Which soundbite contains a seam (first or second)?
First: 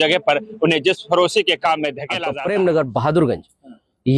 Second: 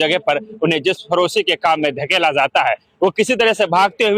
first